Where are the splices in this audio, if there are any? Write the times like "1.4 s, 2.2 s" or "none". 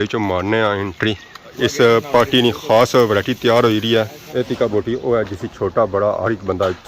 1.5 s, 4.2 s

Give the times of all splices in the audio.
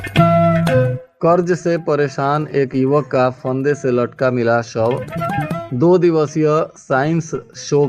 1.0 s

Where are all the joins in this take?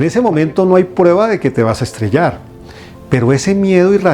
none

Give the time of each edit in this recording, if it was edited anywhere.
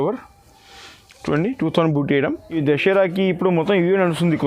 2.5 s

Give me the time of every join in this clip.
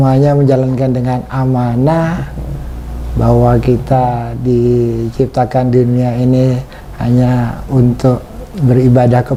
none

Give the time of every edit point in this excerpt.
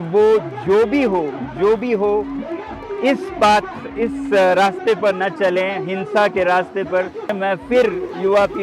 7.3 s

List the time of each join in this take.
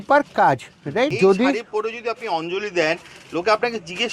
1.1 s

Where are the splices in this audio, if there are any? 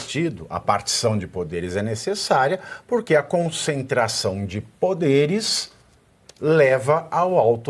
none

